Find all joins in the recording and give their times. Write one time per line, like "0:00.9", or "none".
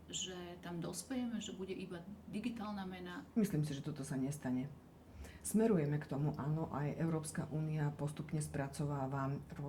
0:03.2